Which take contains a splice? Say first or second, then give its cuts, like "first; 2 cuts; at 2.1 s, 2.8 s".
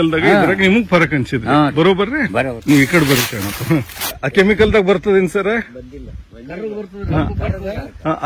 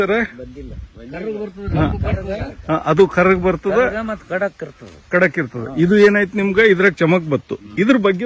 first; 1 cut; at 4.2 s